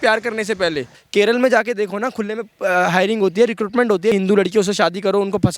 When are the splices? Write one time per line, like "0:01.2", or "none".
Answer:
0:01.0
0:04.1